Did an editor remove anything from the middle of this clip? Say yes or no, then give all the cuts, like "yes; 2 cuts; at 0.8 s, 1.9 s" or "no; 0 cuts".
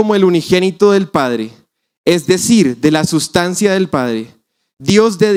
no; 0 cuts